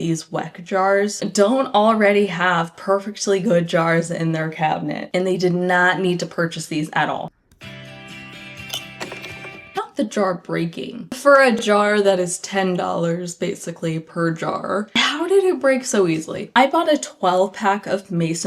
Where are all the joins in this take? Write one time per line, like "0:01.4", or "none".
0:07.3
0:16.4